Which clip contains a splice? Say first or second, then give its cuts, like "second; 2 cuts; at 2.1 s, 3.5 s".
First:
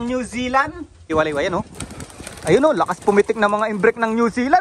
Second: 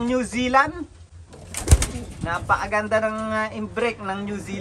first; 1 cut; at 1.1 s